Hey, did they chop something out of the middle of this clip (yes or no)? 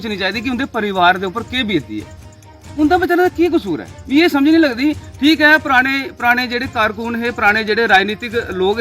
yes